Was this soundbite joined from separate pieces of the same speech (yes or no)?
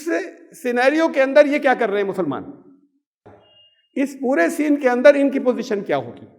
yes